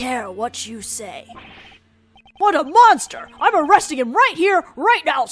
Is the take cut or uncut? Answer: cut